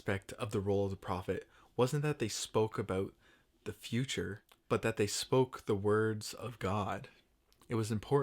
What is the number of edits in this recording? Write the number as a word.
one